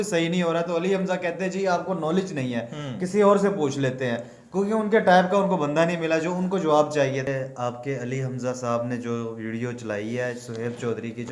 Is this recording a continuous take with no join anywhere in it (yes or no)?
no